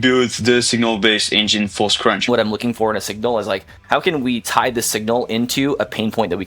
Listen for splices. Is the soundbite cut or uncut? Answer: cut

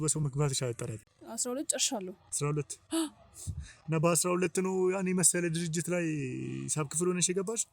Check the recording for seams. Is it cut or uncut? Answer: cut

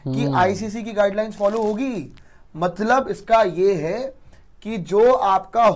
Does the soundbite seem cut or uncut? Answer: uncut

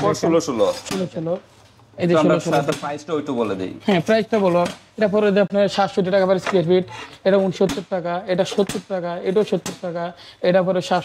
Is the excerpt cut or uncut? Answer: uncut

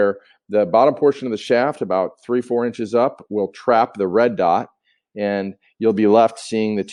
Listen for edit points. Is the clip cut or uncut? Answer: uncut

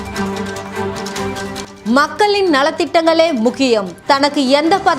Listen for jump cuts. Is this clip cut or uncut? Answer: cut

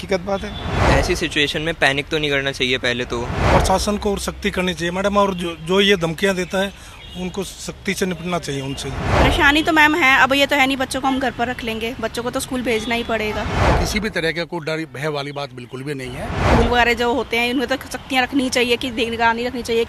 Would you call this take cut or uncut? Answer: cut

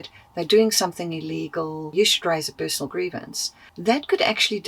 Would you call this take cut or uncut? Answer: cut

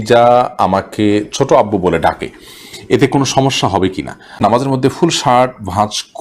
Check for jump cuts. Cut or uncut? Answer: cut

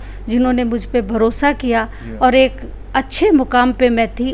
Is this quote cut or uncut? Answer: uncut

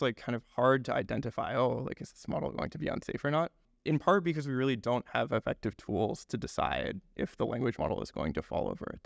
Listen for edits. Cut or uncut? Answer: cut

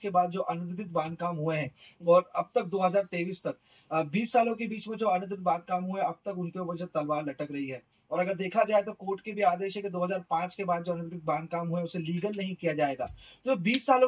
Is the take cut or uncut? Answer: uncut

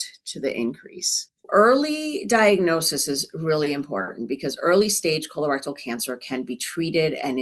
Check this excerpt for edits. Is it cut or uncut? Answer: cut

